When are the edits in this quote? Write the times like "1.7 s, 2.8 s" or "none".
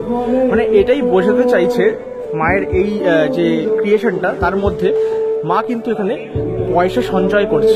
none